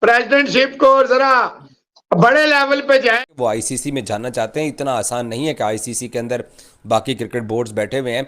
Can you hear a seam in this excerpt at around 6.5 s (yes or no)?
no